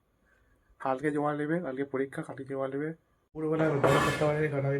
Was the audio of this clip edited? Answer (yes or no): yes